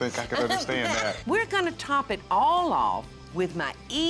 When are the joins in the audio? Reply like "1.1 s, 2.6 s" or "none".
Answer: 1.3 s, 3.2 s